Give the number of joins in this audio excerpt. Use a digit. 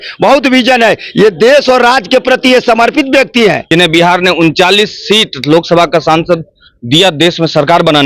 1